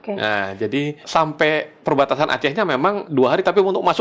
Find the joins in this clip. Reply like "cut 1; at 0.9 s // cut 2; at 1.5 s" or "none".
cut 1; at 1.0 s // cut 2; at 3.0 s